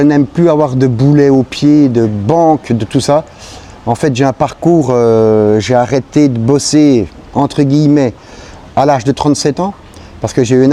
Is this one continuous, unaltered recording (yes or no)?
yes